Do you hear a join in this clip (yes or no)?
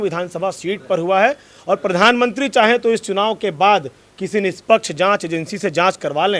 no